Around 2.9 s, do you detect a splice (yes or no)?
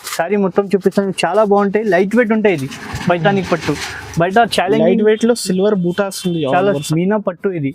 no